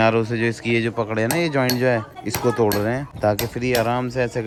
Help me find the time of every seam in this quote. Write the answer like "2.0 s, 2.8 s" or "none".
none